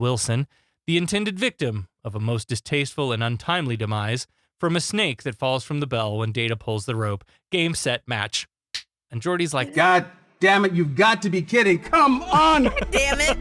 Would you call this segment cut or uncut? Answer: cut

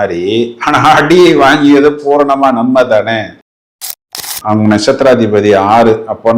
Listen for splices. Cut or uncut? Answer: cut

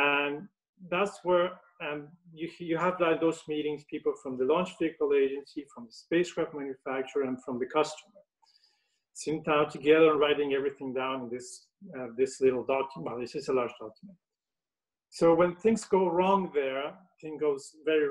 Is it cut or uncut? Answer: uncut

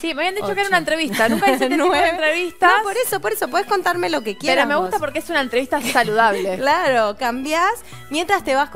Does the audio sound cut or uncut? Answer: uncut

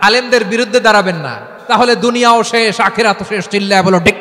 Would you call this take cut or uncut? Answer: cut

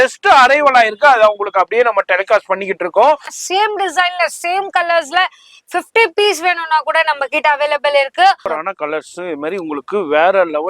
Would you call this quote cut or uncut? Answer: cut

